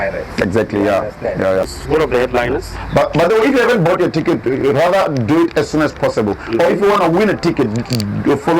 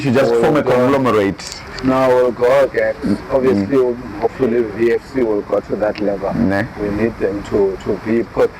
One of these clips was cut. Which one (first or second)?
first